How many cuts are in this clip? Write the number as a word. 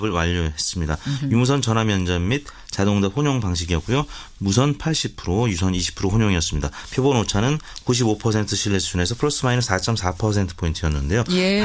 zero